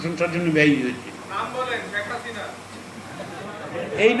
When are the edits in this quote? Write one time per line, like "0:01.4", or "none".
0:01.2

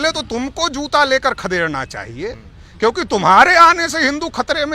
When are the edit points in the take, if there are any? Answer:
none

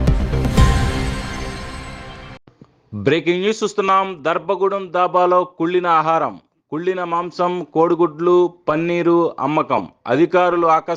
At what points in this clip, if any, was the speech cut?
0:02.4

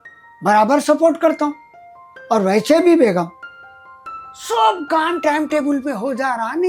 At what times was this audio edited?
none

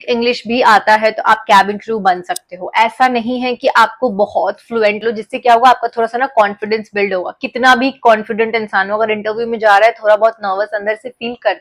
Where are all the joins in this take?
0:05.0

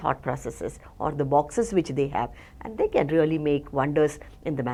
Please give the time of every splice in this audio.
none

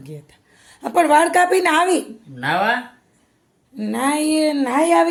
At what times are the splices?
none

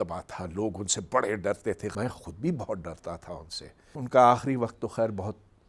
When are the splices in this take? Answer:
0:01.9
0:03.9

